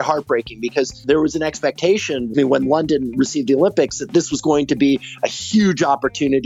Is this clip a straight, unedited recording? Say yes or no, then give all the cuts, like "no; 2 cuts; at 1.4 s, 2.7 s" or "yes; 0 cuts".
no; 2 cuts; at 1.0 s, 2.3 s